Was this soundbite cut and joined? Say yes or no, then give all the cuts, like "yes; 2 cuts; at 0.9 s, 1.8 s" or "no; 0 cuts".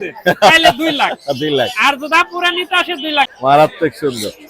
yes; 1 cut; at 3.3 s